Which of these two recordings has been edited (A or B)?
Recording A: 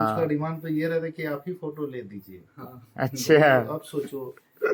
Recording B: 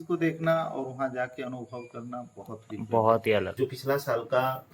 B